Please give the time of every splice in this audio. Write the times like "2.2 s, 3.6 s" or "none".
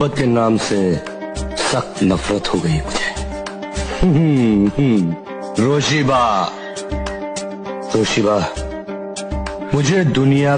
none